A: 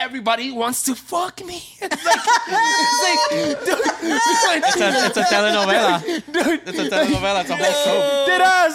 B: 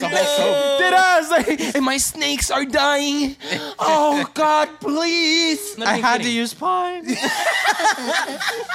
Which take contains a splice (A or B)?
B